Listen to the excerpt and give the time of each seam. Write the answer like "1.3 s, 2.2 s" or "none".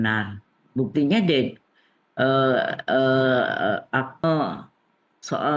4.2 s